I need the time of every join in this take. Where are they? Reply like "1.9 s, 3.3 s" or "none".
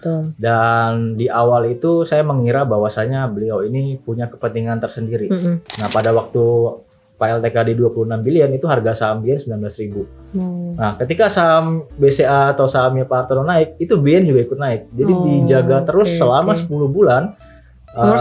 5.7 s